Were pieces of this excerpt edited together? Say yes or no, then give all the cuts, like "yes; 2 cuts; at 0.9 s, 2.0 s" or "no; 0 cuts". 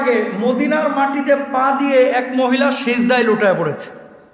no; 0 cuts